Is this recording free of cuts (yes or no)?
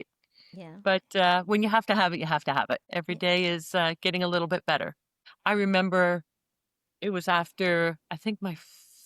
no